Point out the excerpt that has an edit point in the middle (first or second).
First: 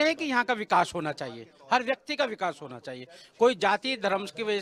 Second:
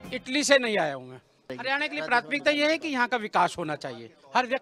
second